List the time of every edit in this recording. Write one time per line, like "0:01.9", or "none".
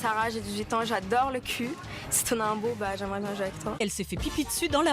0:03.7

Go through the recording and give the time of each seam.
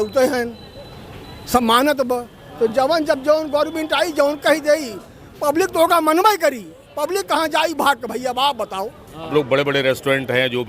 0:09.3

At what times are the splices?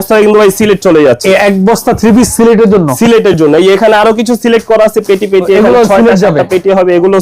0:01.2

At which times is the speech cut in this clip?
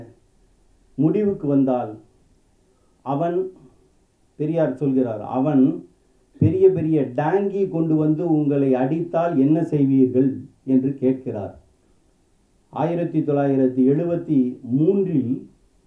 none

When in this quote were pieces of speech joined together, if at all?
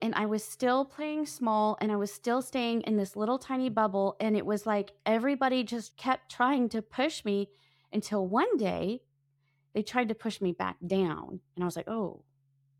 0:05.9

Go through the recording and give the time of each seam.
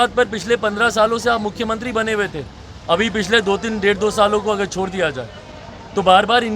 none

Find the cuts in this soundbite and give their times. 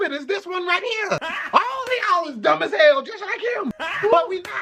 none

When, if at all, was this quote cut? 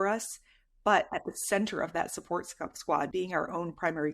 0:03.1

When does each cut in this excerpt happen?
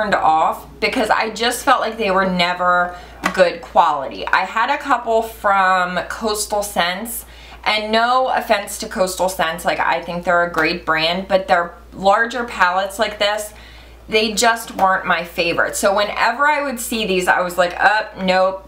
0:02.4

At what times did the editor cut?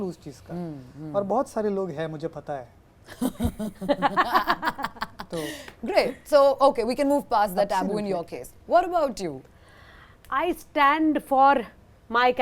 none

